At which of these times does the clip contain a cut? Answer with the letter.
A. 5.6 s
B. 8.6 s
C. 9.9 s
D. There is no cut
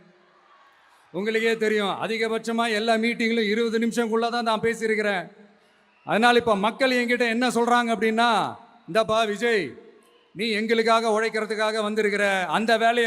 D